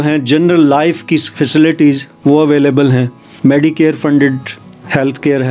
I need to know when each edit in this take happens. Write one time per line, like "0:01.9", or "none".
0:03.2